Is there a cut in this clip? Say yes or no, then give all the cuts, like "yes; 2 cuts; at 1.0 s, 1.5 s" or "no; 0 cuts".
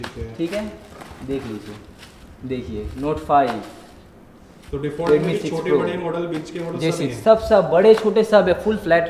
no; 0 cuts